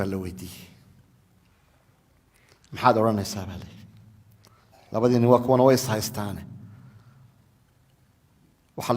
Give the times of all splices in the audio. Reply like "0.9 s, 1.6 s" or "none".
1.2 s